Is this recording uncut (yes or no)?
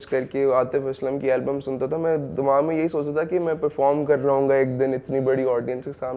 yes